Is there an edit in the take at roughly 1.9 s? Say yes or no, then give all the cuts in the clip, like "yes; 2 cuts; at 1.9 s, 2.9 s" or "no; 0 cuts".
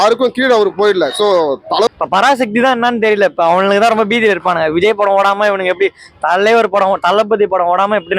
yes; 1 cut; at 1.9 s